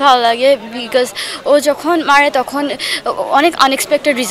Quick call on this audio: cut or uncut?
uncut